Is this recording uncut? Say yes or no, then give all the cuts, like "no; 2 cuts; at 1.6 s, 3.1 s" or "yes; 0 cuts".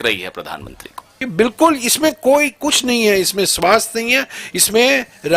no; 1 cut; at 1.2 s